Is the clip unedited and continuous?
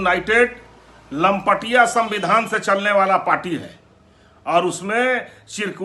yes; 0 cuts

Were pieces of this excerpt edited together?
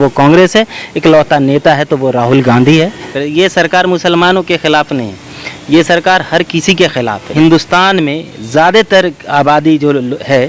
yes; 2 cuts; at 3.0 s, 7.3 s

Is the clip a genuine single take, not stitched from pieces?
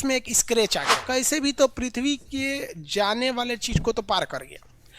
no; 1 cut; at 1.0 s

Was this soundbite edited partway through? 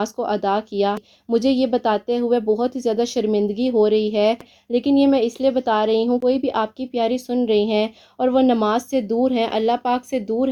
no; 0 cuts

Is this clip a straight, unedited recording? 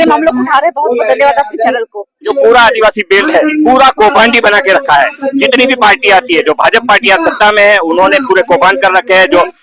no; 1 cut; at 2.3 s

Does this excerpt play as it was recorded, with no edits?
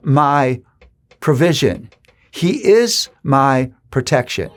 yes; 0 cuts

